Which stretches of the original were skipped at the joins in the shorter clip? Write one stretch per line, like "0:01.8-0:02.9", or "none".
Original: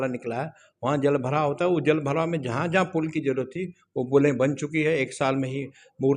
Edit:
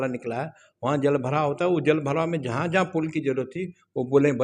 none

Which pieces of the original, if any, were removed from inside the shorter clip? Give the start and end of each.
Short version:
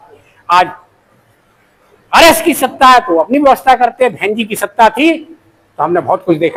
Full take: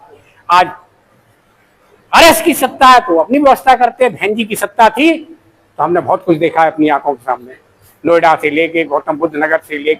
none

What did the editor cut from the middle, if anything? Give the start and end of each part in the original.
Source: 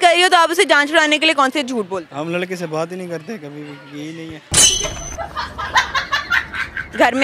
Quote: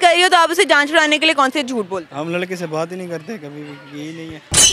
none

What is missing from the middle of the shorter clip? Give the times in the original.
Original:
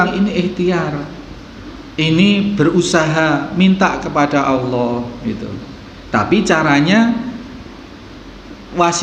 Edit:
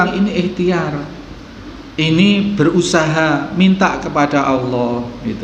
none

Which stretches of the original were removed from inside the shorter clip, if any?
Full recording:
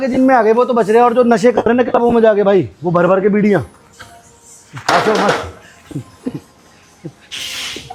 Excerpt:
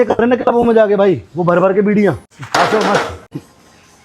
0:03.8-0:04.7
0:05.7-0:06.3

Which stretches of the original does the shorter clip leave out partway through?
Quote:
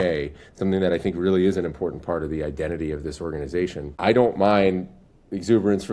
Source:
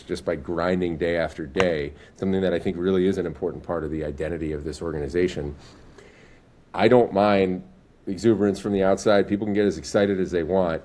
0:05.5-0:06.6

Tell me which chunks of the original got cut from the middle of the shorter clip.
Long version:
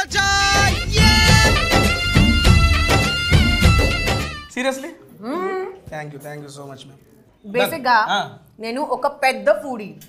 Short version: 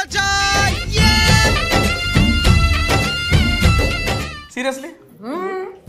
none

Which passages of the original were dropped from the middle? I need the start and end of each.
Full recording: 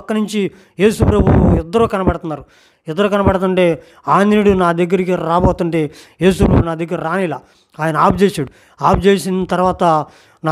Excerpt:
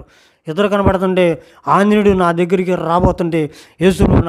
none

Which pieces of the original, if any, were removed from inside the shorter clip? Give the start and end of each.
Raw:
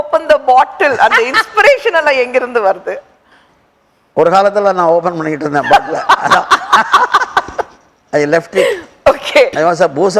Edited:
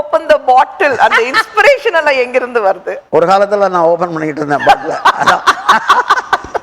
0:02.9-0:04.0

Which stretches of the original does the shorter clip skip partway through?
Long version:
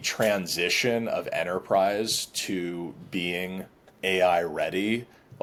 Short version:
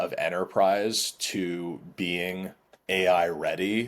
none

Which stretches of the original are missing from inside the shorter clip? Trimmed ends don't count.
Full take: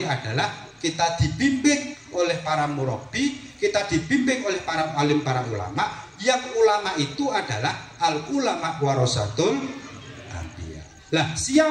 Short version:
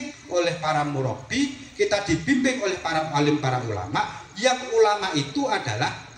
none

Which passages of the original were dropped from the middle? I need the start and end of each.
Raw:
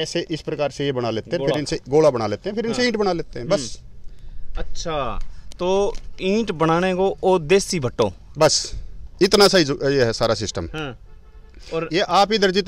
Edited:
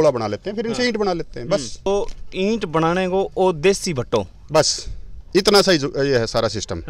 0:03.9-0:05.7

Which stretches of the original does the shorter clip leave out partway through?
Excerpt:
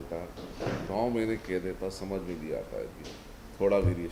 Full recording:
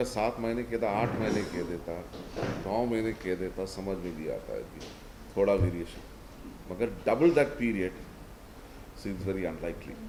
none

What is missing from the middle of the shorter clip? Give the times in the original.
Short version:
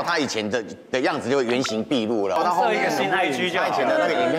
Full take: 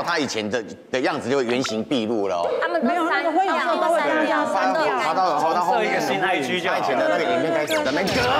0:02.4-0:05.5

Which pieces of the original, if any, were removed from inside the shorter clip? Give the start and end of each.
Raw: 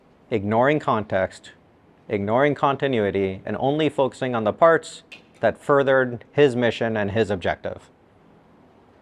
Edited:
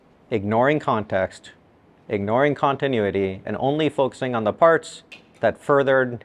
none

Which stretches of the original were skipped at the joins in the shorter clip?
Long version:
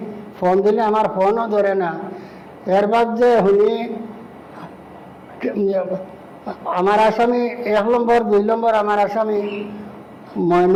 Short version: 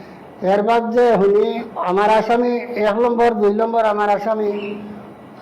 0:03.9-0:06.6

